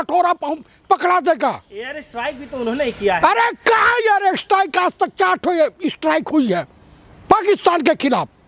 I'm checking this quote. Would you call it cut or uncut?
uncut